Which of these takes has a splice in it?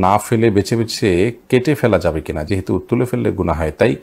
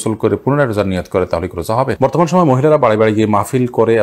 second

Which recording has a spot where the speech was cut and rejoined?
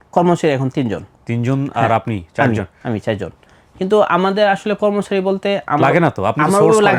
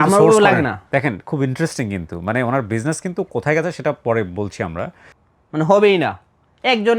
second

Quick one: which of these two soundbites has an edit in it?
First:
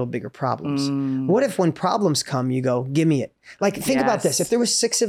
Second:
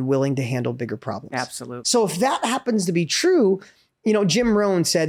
second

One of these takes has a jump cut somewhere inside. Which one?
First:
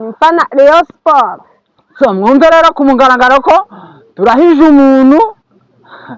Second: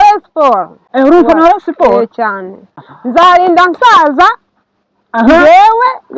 second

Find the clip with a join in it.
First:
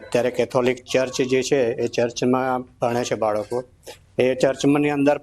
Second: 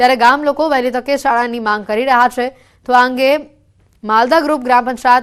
first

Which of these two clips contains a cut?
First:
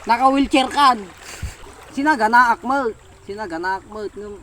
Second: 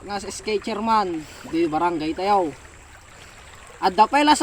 first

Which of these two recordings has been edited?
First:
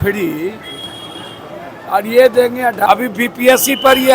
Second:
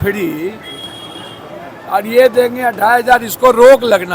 first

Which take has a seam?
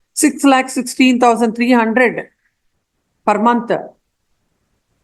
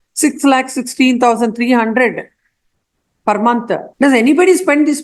second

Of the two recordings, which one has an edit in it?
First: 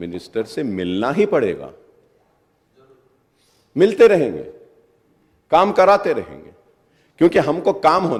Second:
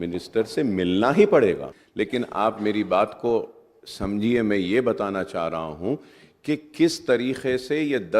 second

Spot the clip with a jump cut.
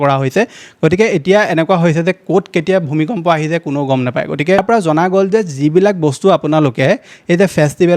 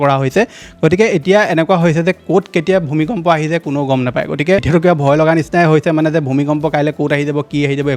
first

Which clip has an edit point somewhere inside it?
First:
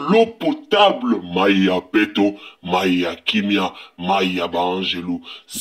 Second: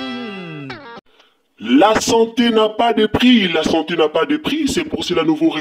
second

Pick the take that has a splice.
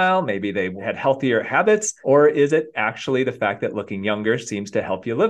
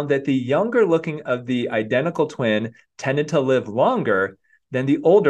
first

